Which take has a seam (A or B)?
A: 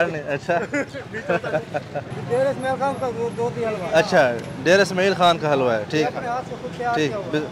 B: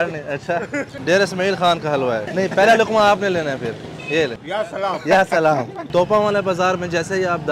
B